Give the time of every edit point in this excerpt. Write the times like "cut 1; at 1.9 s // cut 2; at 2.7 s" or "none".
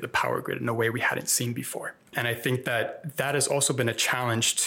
cut 1; at 2.0 s